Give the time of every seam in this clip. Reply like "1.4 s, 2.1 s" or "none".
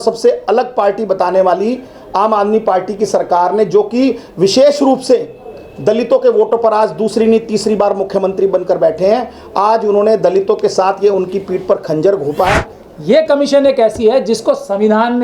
12.7 s